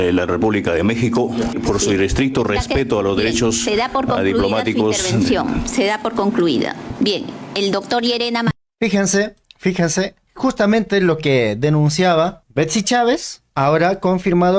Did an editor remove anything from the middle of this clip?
yes; 6 cuts; at 1.6 s, 6.9 s, 8.7 s, 9.4 s, 12.4 s, 13.4 s

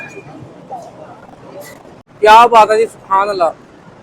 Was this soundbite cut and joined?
yes; 1 cut; at 2.0 s

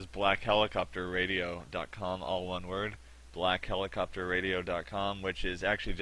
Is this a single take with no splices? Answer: no; 1 cut; at 4.1 s

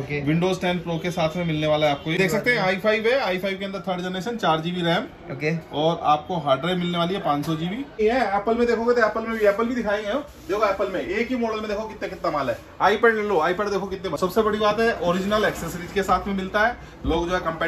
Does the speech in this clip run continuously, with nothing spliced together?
no; 3 cuts; at 2.2 s, 8.0 s, 14.2 s

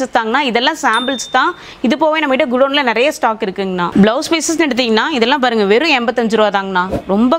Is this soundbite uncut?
yes; 0 cuts

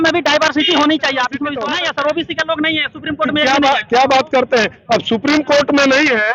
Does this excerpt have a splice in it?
yes; 1 cut; at 1.6 s

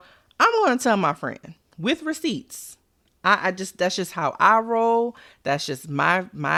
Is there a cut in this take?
no; 0 cuts

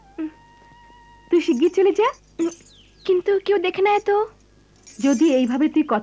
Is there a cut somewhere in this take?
yes; 1 cut; at 2.2 s

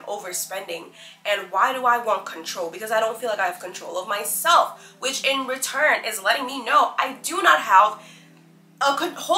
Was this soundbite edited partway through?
no; 0 cuts

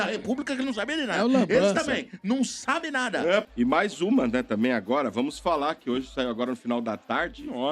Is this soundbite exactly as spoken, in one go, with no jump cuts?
no; 1 cut; at 3.4 s

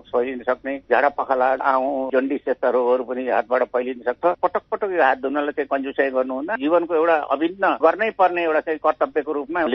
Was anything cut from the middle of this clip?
yes; 3 cuts; at 1.6 s, 4.3 s, 6.6 s

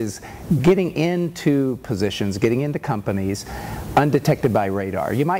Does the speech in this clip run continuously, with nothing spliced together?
yes; 0 cuts

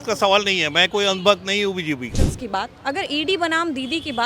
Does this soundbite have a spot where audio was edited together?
yes; 1 cut; at 2.2 s

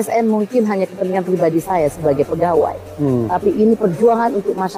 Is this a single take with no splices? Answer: yes; 0 cuts

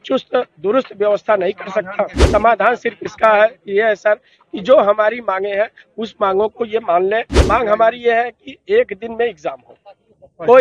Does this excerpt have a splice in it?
yes; 2 cuts; at 2.2 s, 7.3 s

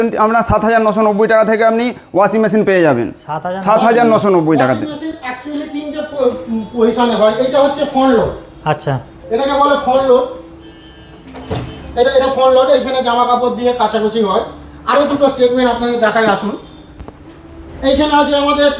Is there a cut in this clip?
no; 0 cuts

